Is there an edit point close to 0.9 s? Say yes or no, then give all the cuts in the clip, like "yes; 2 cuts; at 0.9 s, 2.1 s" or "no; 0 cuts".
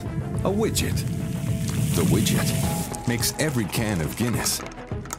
yes; 1 cut; at 0.9 s